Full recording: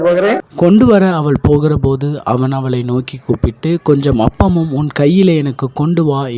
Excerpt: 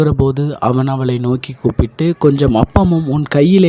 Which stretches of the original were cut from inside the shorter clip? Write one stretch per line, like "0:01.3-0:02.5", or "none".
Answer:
none